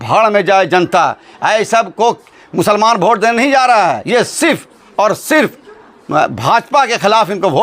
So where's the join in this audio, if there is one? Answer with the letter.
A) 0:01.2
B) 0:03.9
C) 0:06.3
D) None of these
D